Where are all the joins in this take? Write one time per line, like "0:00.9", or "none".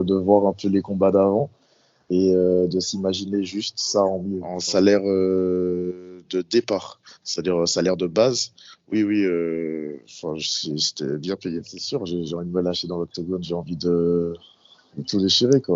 0:04.6
0:11.8